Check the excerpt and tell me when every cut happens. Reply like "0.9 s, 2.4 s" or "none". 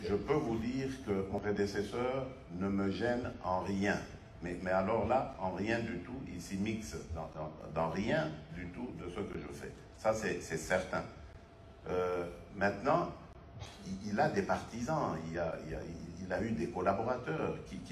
1.3 s